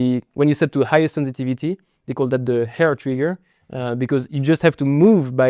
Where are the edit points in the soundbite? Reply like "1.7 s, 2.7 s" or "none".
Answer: none